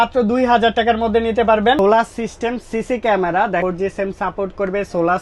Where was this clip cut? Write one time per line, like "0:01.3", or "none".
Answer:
0:01.8
0:03.6